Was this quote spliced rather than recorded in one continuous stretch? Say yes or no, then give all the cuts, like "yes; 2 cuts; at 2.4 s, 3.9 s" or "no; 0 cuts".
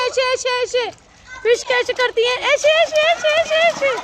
no; 0 cuts